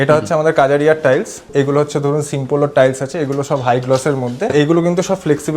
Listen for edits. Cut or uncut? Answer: cut